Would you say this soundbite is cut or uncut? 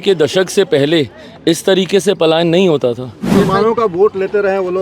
cut